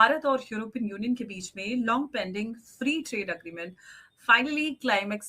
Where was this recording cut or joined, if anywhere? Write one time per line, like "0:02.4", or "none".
none